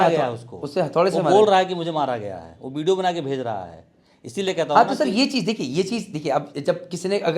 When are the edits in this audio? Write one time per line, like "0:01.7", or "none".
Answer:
none